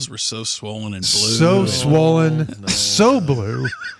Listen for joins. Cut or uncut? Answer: uncut